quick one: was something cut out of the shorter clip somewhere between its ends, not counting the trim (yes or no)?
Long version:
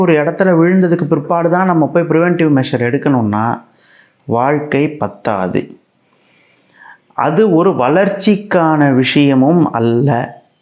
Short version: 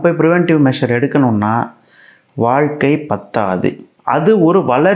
yes